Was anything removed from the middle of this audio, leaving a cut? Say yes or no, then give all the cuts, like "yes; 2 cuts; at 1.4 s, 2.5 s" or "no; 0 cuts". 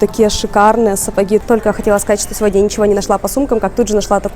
yes; 1 cut; at 1.4 s